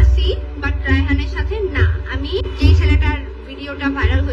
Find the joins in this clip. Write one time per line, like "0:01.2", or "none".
0:02.5